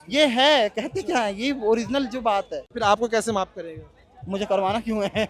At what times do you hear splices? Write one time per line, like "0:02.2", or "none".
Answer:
0:02.6